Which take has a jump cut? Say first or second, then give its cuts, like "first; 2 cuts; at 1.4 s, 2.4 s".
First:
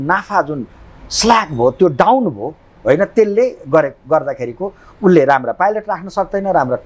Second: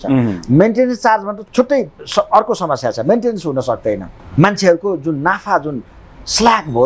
second; 2 cuts; at 1.4 s, 4.2 s